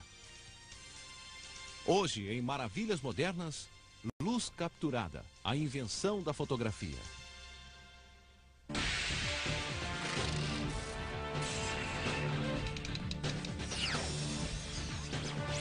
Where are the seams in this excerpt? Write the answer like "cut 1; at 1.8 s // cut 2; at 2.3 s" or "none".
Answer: cut 1; at 6.5 s